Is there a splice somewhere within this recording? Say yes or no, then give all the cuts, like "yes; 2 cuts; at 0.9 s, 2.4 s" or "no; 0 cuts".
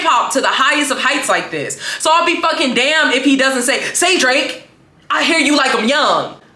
no; 0 cuts